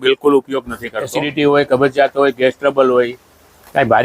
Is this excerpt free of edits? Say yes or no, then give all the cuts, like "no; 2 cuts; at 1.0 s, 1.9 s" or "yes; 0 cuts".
no; 1 cut; at 1.2 s